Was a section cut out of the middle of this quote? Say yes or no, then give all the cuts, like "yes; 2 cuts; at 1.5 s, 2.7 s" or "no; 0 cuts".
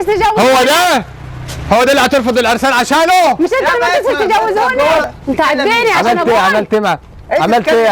yes; 1 cut; at 5.1 s